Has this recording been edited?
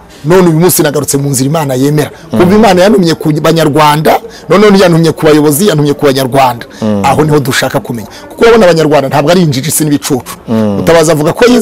no; 0 cuts

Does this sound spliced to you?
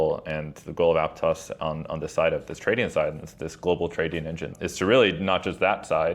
yes; 1 cut; at 4.5 s

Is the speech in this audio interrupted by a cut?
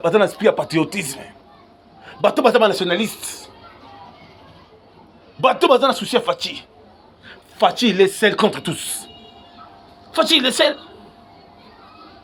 no; 0 cuts

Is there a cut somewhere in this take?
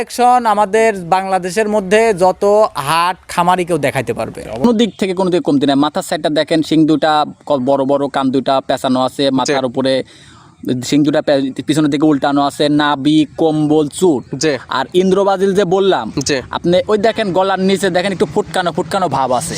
yes; 1 cut; at 4.6 s

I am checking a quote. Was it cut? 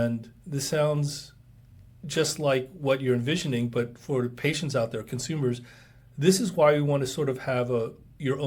no; 0 cuts

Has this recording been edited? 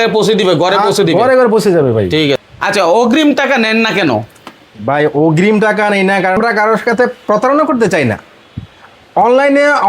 yes; 2 cuts; at 2.4 s, 6.4 s

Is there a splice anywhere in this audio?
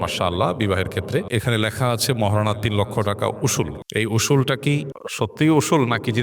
yes; 3 cuts; at 1.3 s, 3.8 s, 5.0 s

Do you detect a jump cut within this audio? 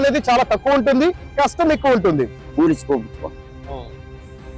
yes; 1 cut; at 2.4 s

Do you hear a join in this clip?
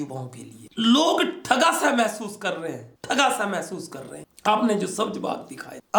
no; 0 cuts

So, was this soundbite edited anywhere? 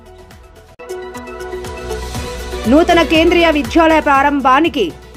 no; 0 cuts

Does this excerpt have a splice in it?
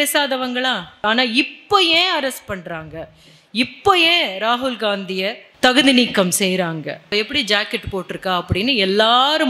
yes; 3 cuts; at 1.0 s, 5.5 s, 7.1 s

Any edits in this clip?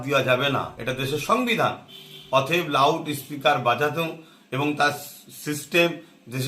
no; 0 cuts

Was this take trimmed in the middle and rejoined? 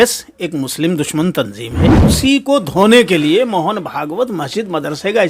yes; 1 cut; at 2.1 s

